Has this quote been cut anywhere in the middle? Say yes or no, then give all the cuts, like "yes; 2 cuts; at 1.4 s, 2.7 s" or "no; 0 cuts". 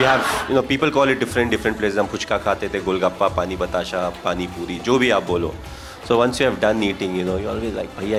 no; 0 cuts